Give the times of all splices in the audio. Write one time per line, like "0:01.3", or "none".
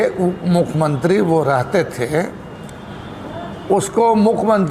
none